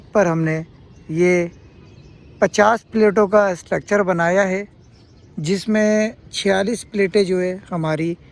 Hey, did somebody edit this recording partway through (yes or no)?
no